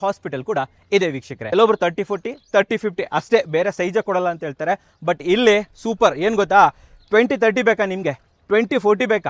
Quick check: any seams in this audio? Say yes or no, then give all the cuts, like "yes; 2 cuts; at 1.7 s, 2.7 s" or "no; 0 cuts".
yes; 1 cut; at 1.4 s